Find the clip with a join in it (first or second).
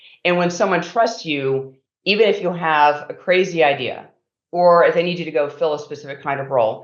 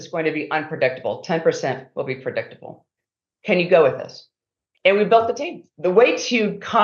second